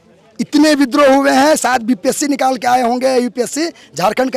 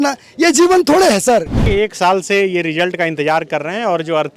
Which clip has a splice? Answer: second; 1 cut; at 1.6 s

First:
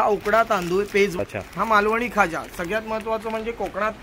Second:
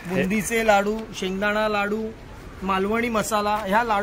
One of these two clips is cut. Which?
first; 1 cut; at 1.2 s

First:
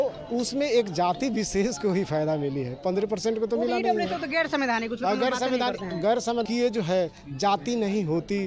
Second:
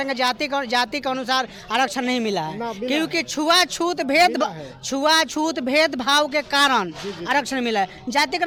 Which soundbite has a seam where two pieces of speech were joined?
first; 1 cut; at 6.5 s

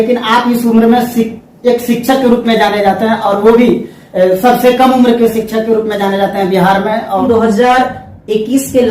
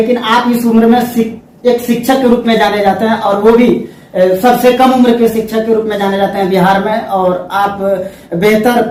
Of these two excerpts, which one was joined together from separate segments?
first; 1 cut; at 7.2 s

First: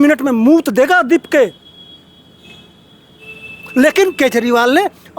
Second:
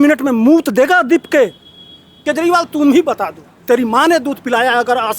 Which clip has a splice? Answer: second; 1 cut; at 2.1 s

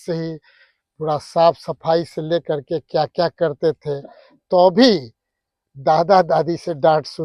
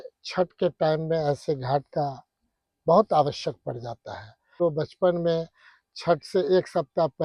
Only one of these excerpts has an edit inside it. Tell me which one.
second; 1 cut; at 4.6 s

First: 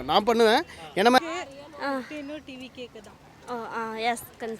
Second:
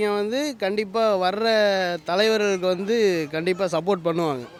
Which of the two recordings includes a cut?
first; 1 cut; at 1.2 s

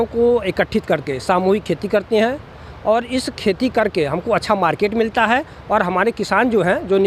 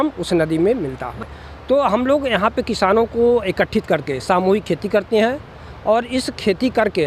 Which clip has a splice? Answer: second; 1 cut; at 1.2 s

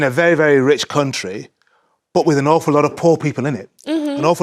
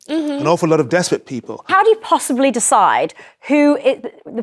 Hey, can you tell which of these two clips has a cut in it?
second; 1 cut; at 1.7 s

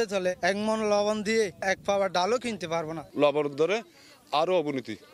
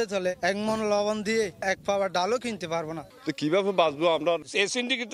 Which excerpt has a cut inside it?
second; 2 cuts; at 3.0 s, 4.4 s

